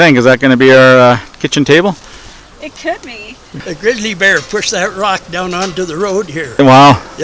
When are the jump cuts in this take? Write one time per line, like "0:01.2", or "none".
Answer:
0:03.7